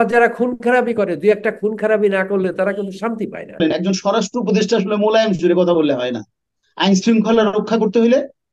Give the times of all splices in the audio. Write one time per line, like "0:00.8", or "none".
0:03.6